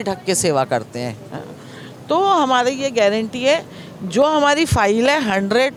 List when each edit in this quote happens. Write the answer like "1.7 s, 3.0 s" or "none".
none